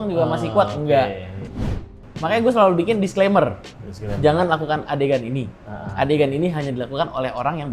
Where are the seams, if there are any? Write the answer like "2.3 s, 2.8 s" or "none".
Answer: 1.8 s